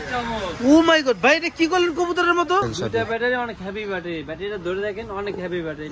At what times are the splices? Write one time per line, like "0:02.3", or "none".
0:02.7